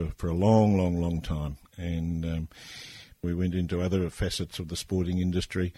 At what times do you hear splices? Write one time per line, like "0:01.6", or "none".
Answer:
0:03.2